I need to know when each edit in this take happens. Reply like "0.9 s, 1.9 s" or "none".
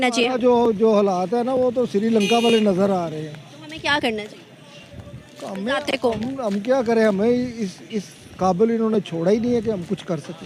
none